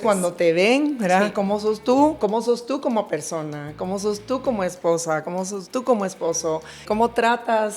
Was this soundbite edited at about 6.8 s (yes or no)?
yes